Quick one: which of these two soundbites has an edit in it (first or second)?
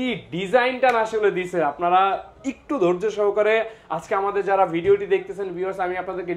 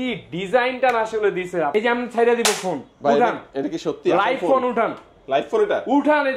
second